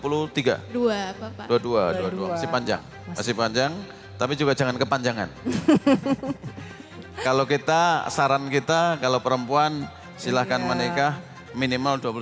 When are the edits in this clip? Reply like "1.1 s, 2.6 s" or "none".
none

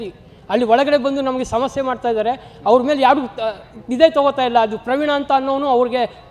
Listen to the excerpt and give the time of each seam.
none

